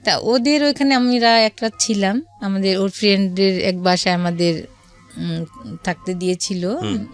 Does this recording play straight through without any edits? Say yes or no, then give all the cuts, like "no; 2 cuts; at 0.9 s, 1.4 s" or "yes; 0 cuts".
yes; 0 cuts